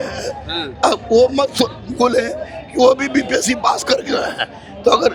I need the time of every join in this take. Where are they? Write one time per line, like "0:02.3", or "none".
none